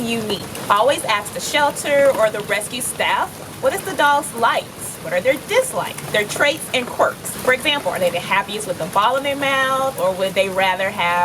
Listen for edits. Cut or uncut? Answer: cut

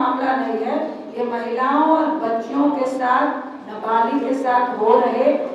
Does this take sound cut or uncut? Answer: uncut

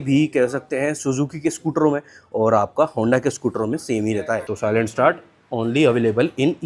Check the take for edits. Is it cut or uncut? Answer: cut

